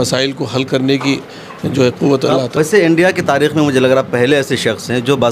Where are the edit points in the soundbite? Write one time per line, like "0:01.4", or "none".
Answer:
0:02.5